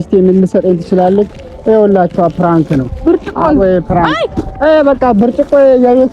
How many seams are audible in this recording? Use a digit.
2